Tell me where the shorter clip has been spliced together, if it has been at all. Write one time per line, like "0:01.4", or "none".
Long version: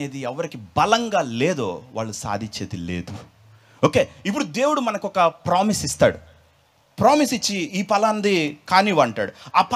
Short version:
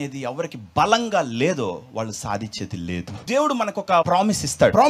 0:03.2
0:04.1